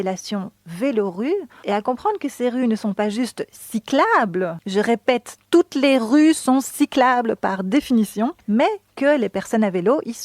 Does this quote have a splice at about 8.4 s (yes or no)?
yes